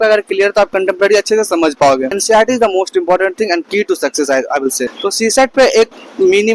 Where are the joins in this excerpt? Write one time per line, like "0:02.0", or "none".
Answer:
0:02.1
0:04.9